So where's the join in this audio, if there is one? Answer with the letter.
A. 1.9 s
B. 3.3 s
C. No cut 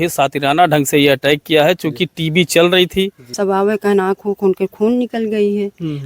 B